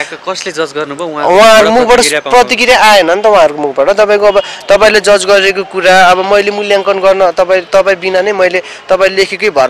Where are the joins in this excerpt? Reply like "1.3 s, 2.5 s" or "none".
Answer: none